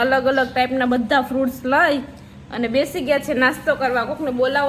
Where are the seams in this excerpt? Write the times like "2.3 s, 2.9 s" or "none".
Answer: none